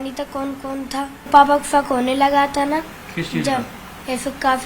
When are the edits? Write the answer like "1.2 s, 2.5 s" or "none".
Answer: 1.3 s